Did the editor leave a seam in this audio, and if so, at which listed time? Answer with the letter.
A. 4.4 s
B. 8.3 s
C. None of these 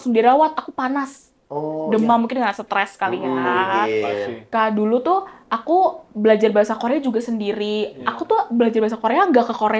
A